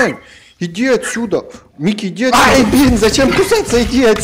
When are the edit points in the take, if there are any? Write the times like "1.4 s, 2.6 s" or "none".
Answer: 2.3 s

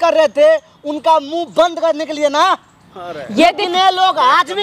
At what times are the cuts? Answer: none

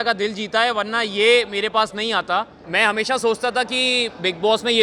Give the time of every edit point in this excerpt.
none

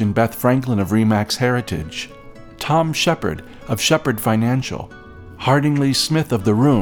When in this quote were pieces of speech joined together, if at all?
none

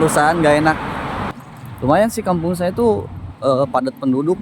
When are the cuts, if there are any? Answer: 1.2 s

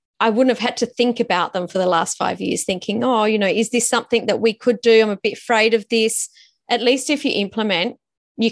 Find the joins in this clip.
none

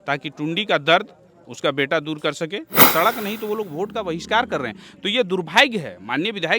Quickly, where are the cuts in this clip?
2.8 s

